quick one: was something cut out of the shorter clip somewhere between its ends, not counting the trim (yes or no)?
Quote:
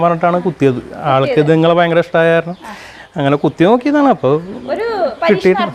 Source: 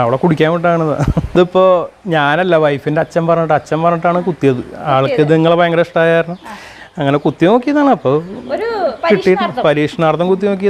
no